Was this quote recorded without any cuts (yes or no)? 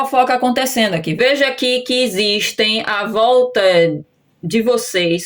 no